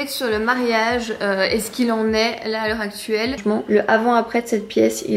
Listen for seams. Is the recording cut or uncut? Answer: cut